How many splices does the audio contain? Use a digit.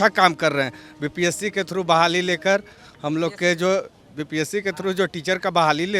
0